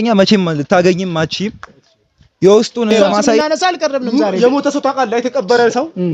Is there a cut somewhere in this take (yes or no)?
yes